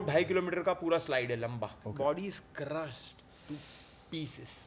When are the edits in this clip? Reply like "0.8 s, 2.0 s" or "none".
1.8 s